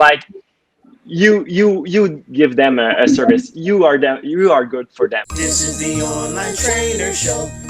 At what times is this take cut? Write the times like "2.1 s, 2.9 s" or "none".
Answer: 5.3 s